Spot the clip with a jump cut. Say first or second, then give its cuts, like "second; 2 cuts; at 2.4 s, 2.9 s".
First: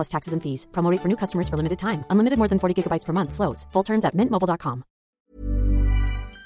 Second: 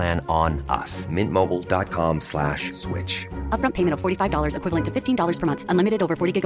first; 1 cut; at 5.1 s